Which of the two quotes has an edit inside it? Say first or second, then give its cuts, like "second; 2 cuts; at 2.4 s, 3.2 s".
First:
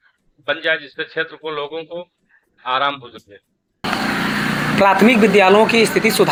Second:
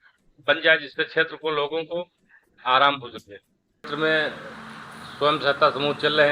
second; 1 cut; at 3.8 s